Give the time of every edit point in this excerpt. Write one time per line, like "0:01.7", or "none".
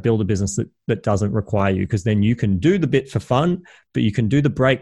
none